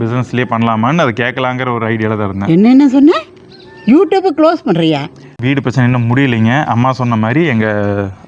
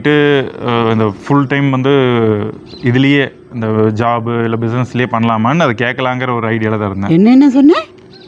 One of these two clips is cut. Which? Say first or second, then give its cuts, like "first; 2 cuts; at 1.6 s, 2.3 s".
first; 1 cut; at 5.3 s